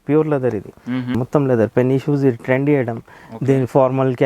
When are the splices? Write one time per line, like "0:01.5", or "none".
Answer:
0:01.1